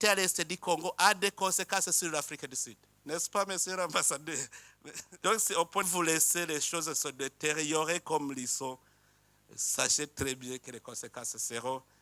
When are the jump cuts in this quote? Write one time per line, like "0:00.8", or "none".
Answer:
0:05.9

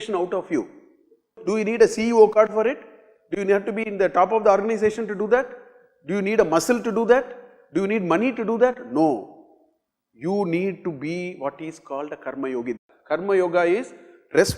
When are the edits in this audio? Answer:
0:01.4
0:12.9

